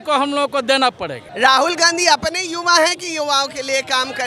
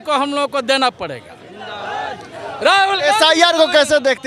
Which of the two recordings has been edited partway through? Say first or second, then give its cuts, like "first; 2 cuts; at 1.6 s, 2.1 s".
first; 1 cut; at 1.2 s